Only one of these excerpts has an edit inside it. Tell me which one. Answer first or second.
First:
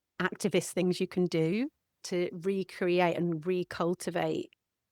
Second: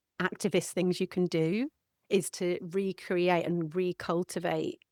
first